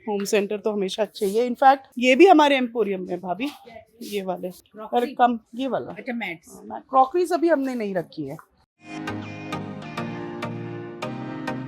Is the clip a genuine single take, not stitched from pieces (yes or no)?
yes